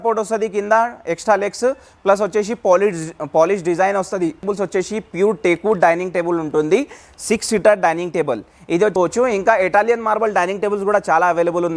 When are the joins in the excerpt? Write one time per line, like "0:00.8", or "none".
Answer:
0:04.4
0:08.9